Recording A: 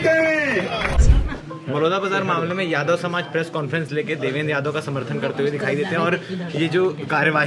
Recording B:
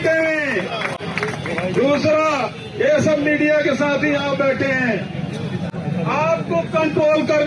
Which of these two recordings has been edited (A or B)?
A